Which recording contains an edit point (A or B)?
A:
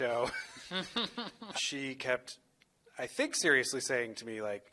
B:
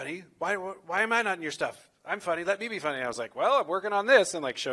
A